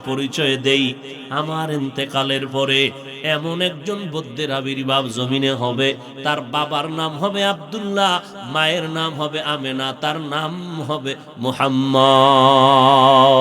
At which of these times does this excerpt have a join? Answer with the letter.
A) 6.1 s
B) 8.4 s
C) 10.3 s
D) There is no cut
A